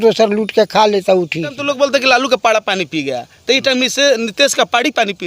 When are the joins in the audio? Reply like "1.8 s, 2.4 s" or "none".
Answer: 1.6 s